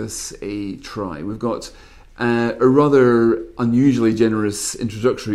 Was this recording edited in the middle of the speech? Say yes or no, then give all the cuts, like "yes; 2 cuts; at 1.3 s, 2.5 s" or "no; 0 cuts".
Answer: no; 0 cuts